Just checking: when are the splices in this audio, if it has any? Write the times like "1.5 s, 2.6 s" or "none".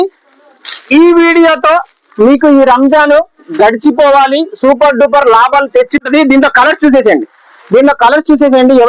6.1 s